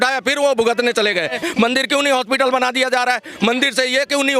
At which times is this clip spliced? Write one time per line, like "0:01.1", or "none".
0:01.3

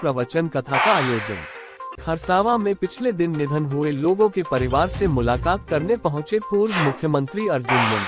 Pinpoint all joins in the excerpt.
0:02.0

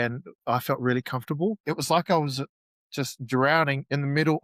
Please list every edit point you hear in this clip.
0:01.6

